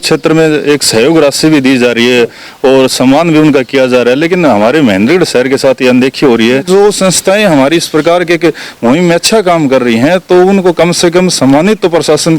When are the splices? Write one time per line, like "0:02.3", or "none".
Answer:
0:06.7